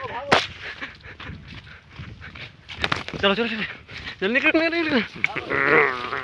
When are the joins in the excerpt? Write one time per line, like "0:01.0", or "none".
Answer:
none